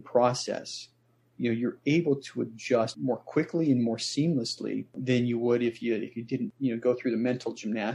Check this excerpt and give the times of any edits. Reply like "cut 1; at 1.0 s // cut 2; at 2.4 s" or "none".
cut 1; at 2.9 s // cut 2; at 5.0 s // cut 3; at 6.5 s